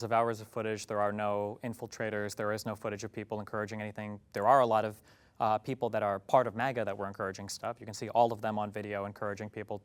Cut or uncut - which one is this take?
uncut